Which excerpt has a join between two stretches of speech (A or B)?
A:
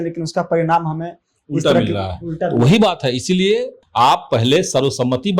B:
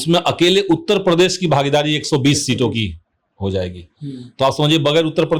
A